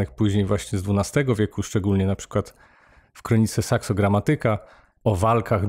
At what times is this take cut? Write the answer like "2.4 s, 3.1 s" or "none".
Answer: none

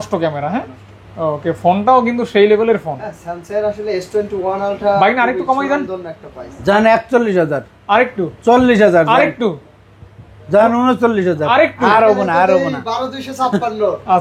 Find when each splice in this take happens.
none

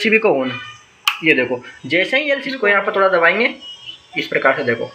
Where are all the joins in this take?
2.5 s

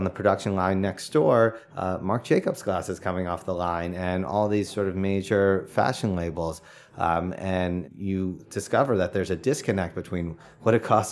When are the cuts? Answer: 8.0 s

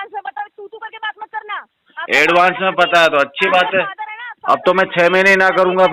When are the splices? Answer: none

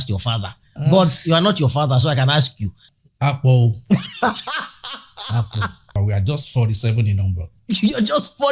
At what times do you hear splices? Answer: 2.8 s, 6.0 s

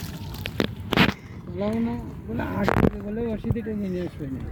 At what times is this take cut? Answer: none

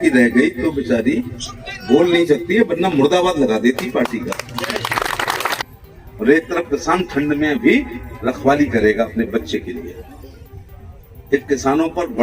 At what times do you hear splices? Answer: 5.6 s

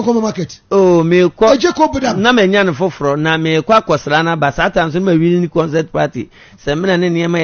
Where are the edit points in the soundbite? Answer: none

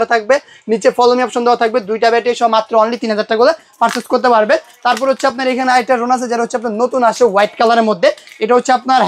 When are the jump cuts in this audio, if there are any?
none

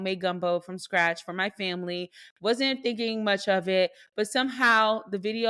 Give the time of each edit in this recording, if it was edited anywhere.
none

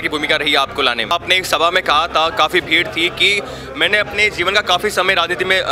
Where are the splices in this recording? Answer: 1.1 s

